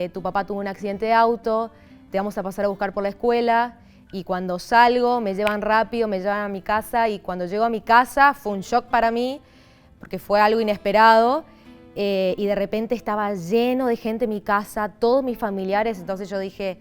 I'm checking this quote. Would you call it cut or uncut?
uncut